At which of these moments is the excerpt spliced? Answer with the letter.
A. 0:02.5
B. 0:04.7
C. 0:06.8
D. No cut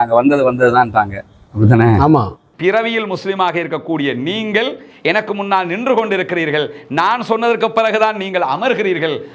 A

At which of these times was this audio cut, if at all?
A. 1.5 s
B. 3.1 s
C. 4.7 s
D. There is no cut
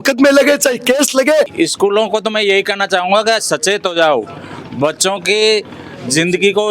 A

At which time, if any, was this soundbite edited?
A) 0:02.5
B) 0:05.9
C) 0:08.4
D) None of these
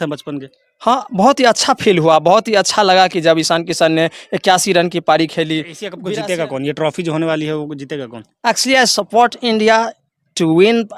B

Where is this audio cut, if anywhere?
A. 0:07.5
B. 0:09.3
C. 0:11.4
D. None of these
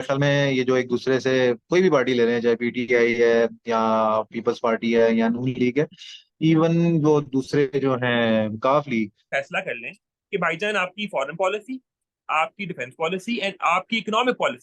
B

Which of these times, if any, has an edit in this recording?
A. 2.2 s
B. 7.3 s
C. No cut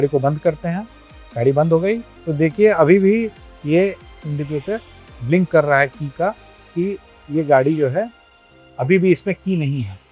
A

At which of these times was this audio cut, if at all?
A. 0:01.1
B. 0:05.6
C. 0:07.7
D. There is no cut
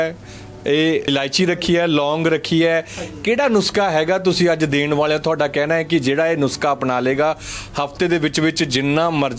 A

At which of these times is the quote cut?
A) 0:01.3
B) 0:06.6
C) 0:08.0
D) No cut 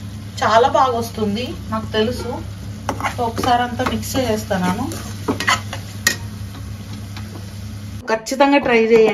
C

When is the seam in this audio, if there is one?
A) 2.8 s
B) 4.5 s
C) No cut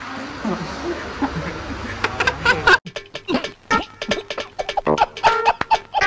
A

